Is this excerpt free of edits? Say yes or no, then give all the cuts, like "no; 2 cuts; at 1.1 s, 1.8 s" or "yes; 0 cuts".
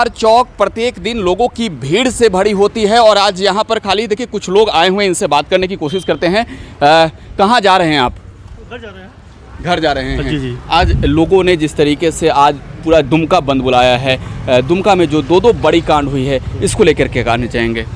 yes; 0 cuts